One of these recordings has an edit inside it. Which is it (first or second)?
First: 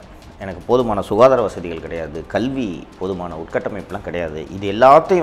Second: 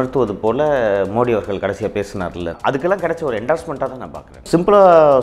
second